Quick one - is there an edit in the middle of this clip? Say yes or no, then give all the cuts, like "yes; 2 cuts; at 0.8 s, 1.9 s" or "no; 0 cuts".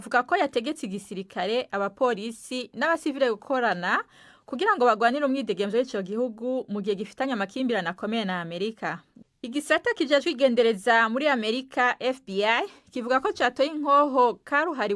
yes; 1 cut; at 9.1 s